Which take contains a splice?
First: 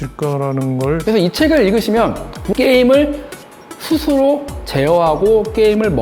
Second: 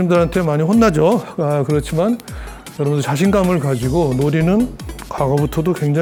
first; 2 cuts; at 1.0 s, 2.5 s

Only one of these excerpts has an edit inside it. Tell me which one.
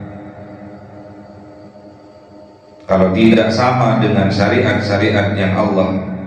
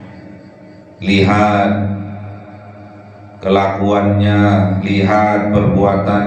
first; 1 cut; at 3.3 s

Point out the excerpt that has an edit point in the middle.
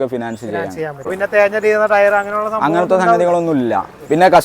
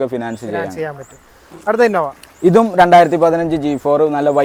first; 1 cut; at 1.2 s

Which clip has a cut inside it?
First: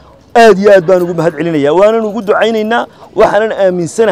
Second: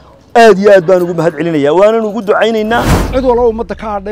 second; 1 cut; at 3.0 s

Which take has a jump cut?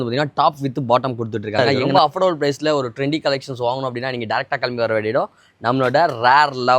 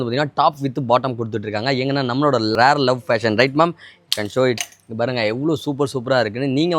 first; 1 cut; at 1.8 s

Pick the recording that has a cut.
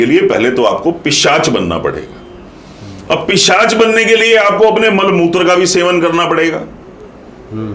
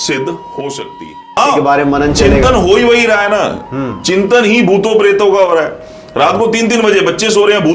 second; 1 cut; at 1.4 s

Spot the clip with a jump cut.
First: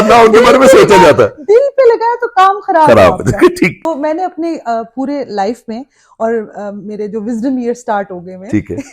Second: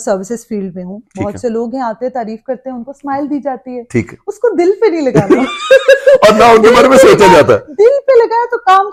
first; 1 cut; at 3.8 s

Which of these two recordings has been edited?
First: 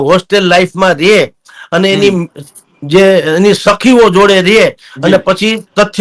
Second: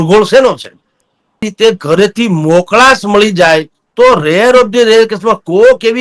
second; 1 cut; at 1.4 s

